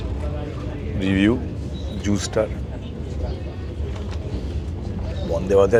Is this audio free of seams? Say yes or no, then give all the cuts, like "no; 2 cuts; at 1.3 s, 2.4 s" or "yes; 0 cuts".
yes; 0 cuts